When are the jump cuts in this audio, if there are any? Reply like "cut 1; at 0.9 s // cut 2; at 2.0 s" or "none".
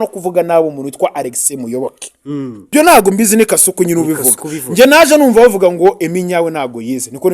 cut 1; at 2.7 s